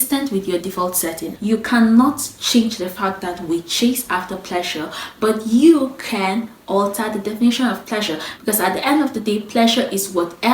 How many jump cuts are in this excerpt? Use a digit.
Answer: 1